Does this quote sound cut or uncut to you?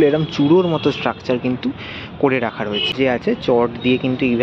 cut